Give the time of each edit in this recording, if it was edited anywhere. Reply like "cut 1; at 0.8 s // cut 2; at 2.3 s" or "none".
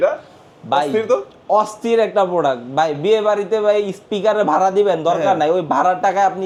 none